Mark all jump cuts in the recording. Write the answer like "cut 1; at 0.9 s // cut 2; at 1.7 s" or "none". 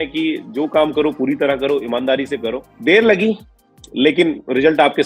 none